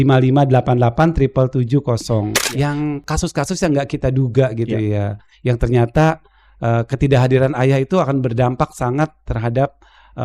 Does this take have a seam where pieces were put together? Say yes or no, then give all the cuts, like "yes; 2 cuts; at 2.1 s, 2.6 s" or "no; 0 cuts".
yes; 1 cut; at 2.4 s